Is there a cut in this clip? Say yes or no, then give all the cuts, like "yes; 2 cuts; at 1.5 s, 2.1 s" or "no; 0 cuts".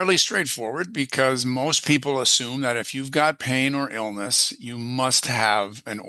no; 0 cuts